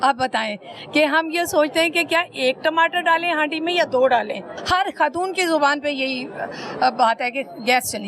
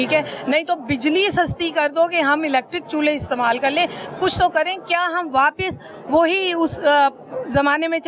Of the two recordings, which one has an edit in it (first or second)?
first